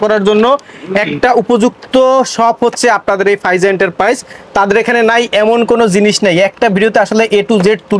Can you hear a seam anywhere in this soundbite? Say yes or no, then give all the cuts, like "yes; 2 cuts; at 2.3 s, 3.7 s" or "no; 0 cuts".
no; 0 cuts